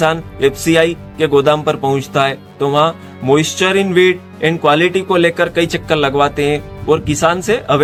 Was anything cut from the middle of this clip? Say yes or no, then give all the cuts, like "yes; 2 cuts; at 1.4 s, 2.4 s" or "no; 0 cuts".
no; 0 cuts